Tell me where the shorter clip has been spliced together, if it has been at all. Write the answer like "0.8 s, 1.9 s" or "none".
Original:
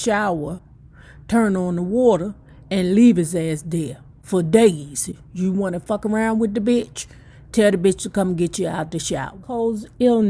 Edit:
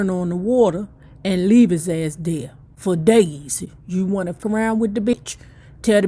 4.4 s, 5.1 s